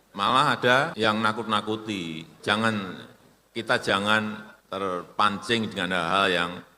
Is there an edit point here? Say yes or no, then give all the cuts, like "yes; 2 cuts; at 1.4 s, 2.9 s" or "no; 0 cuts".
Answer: yes; 3 cuts; at 0.9 s, 2.3 s, 4.5 s